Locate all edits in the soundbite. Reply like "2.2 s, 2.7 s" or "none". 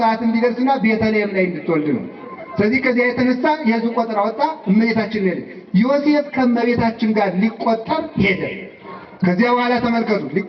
none